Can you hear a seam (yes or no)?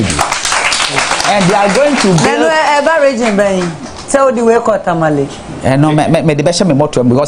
no